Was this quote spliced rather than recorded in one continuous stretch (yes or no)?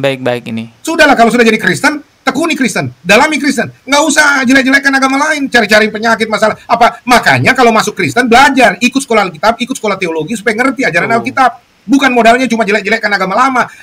no